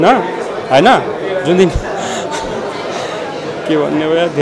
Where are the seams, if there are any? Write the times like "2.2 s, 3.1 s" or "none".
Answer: none